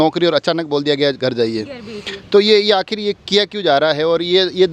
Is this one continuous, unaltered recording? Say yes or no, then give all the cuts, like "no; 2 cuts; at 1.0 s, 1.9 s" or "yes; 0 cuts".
yes; 0 cuts